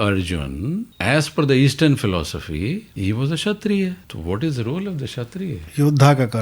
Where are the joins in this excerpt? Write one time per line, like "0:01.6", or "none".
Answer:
0:00.9
0:02.9
0:04.1